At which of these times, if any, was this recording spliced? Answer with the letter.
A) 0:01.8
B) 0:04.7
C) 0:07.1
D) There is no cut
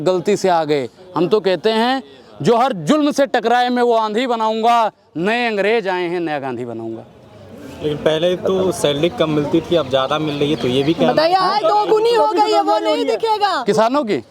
D